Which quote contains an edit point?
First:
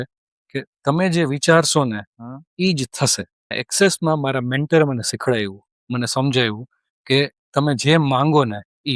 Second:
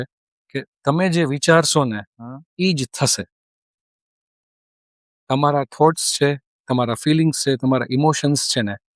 first; 1 cut; at 3.6 s

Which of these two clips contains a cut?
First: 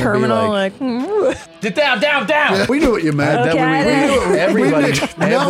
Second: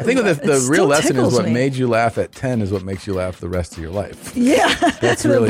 first; 2 cuts; at 1.5 s, 2.7 s

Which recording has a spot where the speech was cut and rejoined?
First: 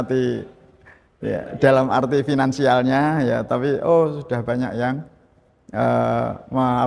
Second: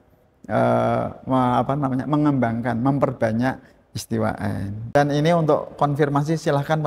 second; 1 cut; at 5.0 s

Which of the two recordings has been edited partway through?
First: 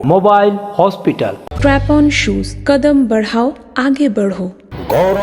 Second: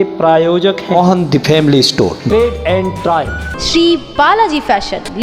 second; 1 cut; at 0.9 s

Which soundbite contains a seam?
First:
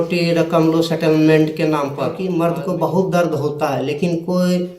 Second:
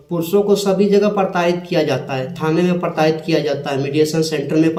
first; 1 cut; at 2.1 s

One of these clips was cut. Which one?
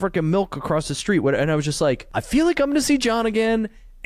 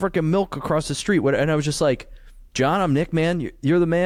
first; 1 cut; at 2.1 s

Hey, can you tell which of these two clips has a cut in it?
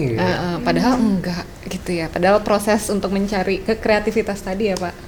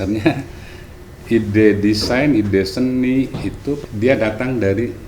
second; 1 cut; at 3.8 s

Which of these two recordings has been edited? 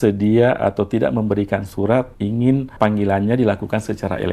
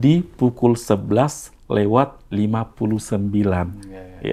first; 1 cut; at 2.7 s

